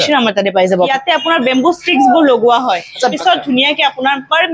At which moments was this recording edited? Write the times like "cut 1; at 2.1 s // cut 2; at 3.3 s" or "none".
cut 1; at 0.9 s // cut 2; at 3.1 s